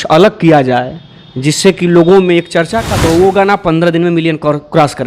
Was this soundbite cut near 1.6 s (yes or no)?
no